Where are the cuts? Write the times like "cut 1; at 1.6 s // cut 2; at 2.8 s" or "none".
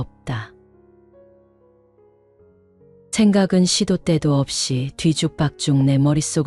cut 1; at 1.0 s // cut 2; at 2.7 s